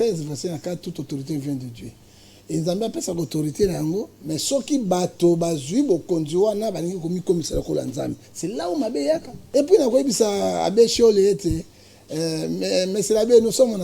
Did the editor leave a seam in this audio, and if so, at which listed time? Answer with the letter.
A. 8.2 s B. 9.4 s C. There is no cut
B